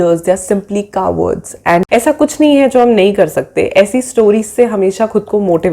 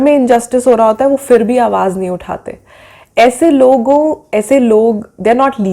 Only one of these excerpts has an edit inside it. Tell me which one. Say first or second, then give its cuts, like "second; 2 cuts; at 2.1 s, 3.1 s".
first; 1 cut; at 1.9 s